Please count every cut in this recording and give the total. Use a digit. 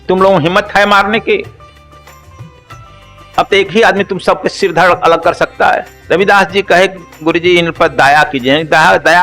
3